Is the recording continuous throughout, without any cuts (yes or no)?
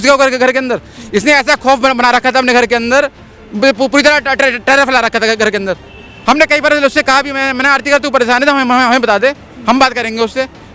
yes